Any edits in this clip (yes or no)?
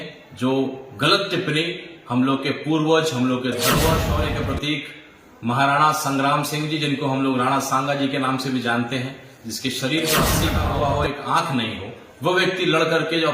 yes